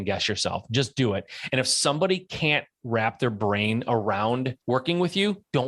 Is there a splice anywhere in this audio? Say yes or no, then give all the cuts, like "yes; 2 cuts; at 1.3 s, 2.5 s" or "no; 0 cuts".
yes; 1 cut; at 4.5 s